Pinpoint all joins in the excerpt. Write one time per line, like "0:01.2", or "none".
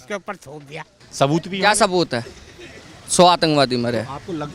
0:01.0